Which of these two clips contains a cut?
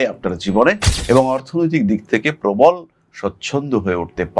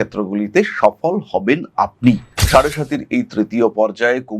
second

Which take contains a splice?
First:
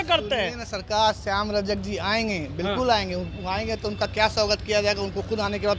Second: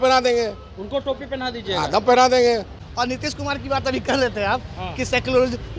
second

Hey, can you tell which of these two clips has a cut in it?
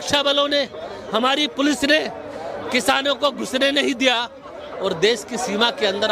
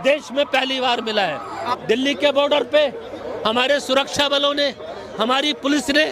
second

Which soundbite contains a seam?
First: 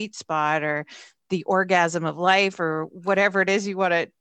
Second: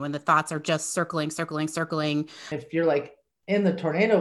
second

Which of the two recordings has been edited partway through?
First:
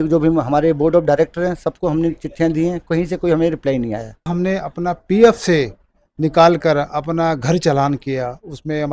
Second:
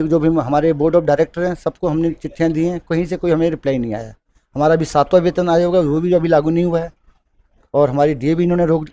first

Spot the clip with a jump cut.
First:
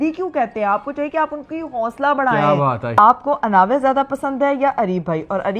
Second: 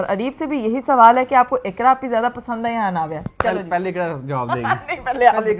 first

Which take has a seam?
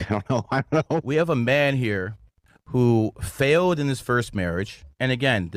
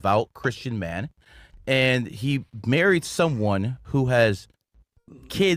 first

